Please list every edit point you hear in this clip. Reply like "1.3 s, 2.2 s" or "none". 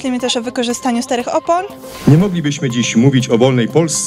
1.8 s